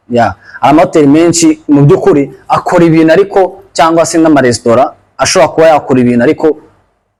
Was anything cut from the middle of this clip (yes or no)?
no